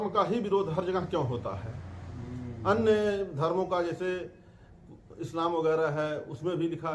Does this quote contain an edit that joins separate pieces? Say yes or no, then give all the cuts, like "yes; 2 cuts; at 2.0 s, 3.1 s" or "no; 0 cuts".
no; 0 cuts